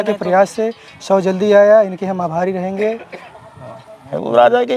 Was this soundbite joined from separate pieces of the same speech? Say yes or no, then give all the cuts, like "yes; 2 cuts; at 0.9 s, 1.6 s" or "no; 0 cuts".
yes; 1 cut; at 3.8 s